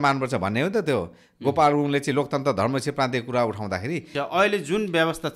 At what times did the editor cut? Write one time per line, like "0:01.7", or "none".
0:04.1